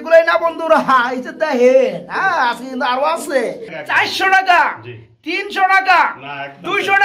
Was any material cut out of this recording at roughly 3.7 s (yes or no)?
yes